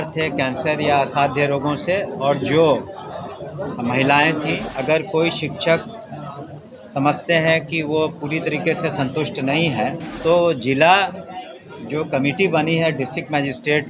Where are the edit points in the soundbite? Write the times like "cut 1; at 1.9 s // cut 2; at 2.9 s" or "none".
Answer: cut 1; at 4.7 s // cut 2; at 10.1 s

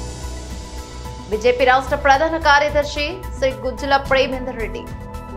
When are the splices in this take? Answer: cut 1; at 1.3 s

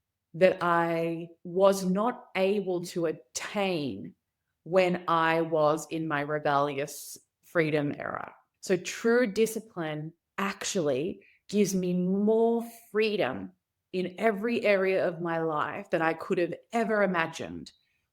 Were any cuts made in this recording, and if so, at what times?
cut 1; at 1.3 s

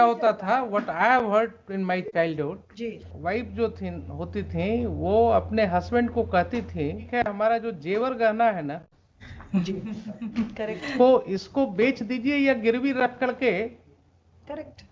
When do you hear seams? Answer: cut 1; at 3.1 s // cut 2; at 7.0 s

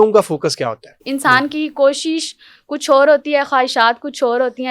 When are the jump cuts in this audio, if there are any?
cut 1; at 0.9 s

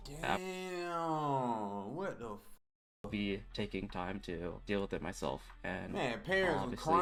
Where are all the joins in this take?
none

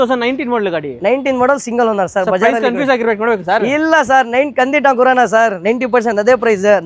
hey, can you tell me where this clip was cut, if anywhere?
none

